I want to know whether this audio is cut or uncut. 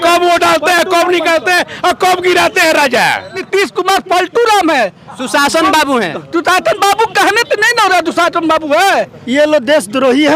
cut